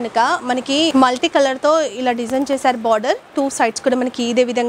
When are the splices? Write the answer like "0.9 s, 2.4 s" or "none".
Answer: 0.9 s